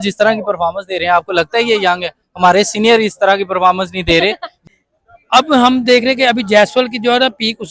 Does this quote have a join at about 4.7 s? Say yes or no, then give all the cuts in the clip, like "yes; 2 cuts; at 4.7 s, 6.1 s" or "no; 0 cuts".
yes; 1 cut; at 4.7 s